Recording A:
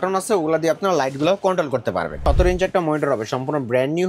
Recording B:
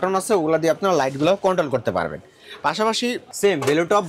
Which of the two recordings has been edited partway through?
A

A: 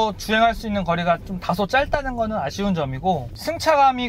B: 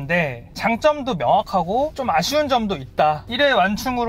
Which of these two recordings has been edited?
B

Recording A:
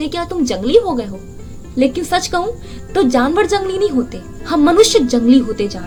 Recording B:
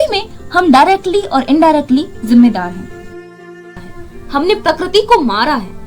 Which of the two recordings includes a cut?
B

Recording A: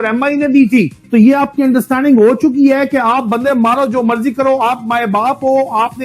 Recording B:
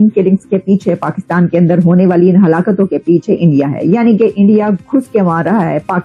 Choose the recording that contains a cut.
A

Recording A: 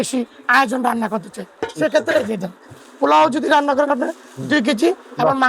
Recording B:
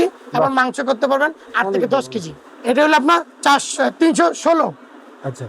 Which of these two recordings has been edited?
B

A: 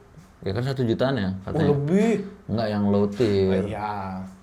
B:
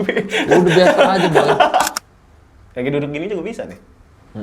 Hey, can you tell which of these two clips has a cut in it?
B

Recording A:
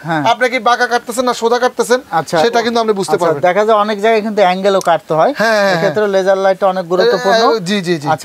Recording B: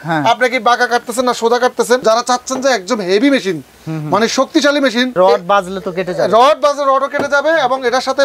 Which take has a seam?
B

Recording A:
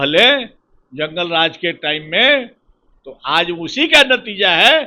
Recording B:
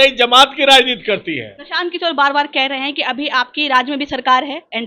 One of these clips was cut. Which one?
B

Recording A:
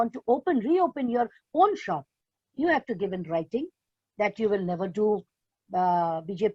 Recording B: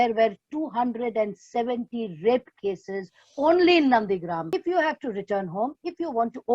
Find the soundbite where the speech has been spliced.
B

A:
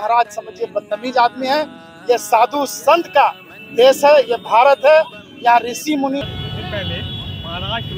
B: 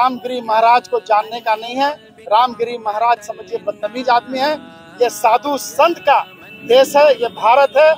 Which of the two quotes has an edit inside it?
A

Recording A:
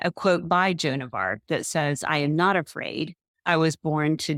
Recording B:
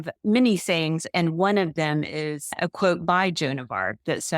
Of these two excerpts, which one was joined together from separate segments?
B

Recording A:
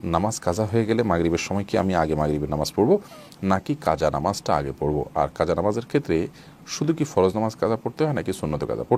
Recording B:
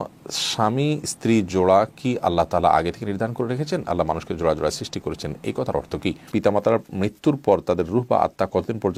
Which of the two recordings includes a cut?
B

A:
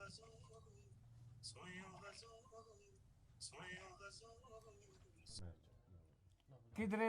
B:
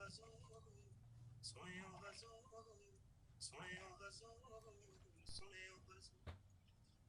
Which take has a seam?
A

